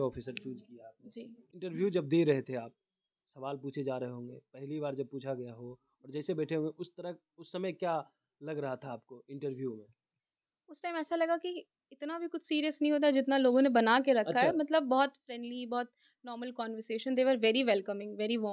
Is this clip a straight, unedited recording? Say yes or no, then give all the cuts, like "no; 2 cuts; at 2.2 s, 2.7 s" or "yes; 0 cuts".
no; 1 cut; at 1.4 s